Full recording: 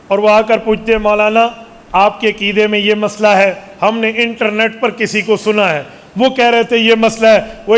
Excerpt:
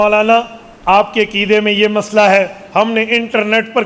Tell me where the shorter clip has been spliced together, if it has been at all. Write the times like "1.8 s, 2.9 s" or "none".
none